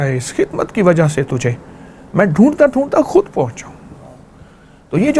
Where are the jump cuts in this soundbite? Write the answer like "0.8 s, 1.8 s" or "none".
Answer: none